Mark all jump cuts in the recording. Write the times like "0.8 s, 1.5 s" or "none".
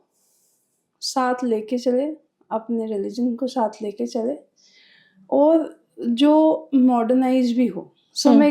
none